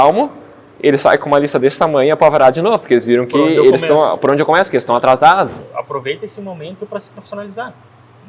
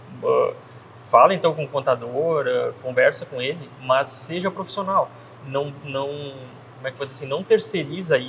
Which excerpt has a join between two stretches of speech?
first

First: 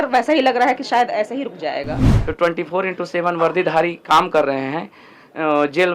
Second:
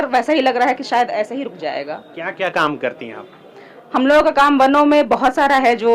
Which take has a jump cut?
first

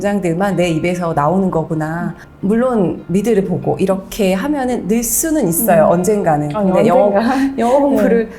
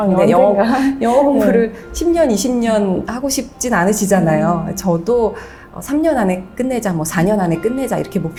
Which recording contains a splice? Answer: first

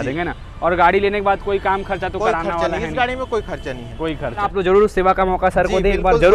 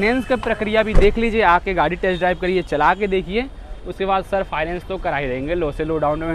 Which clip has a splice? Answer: first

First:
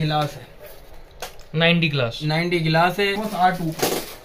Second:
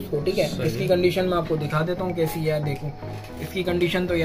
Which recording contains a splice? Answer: first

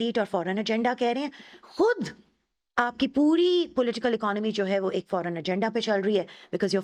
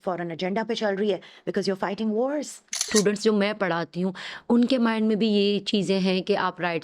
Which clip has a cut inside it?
second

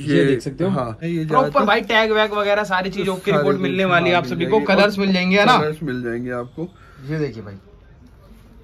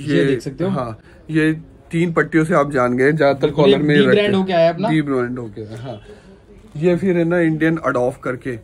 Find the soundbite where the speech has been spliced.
first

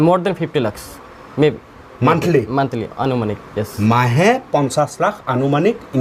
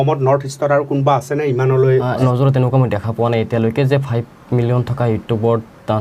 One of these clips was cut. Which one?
second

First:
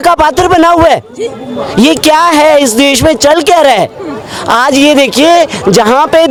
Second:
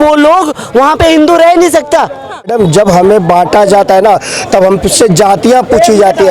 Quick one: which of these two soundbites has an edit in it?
second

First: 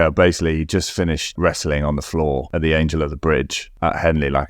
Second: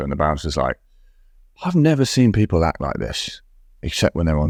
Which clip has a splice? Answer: first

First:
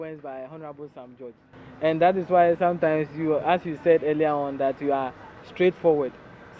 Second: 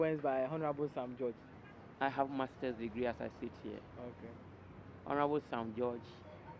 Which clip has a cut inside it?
second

